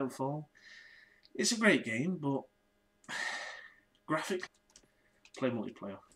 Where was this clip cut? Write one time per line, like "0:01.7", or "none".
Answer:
none